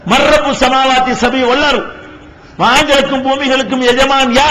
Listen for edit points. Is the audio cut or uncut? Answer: cut